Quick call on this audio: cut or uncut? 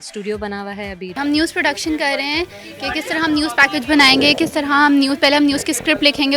cut